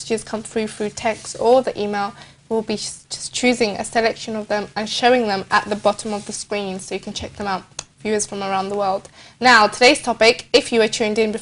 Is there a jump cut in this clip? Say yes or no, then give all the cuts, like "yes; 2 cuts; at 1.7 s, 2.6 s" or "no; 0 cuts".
yes; 1 cut; at 9.1 s